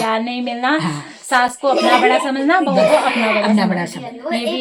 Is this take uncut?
yes; 0 cuts

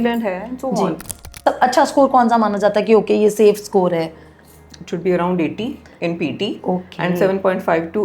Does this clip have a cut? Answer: yes; 1 cut; at 1.3 s

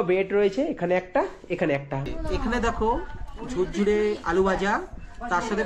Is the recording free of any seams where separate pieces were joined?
no; 1 cut; at 2.1 s

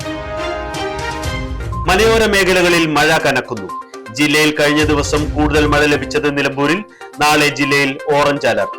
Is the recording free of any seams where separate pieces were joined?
no; 1 cut; at 1.8 s

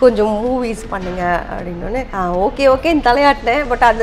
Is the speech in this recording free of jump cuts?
no; 1 cut; at 2.1 s

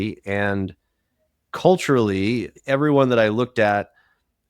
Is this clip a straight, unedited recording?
no; 1 cut; at 2.5 s

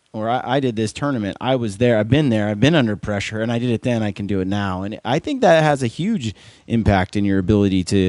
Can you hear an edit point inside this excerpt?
no; 0 cuts

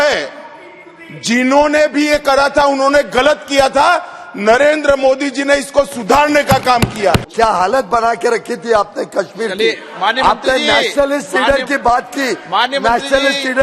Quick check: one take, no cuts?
no; 1 cut; at 7.3 s

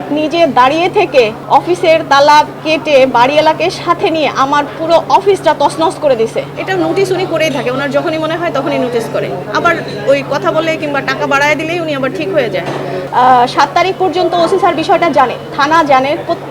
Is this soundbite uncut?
no; 3 cuts; at 1.4 s, 6.6 s, 13.0 s

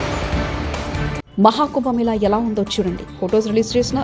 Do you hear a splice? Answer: yes; 1 cut; at 1.2 s

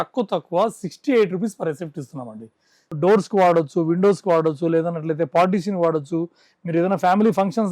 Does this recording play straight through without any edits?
no; 1 cut; at 2.9 s

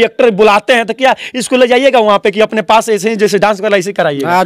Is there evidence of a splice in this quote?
no; 0 cuts

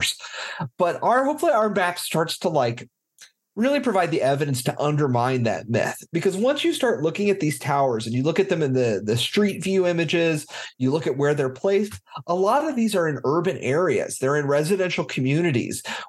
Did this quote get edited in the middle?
no; 0 cuts

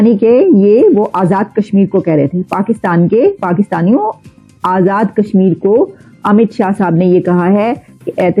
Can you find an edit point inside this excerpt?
no; 0 cuts

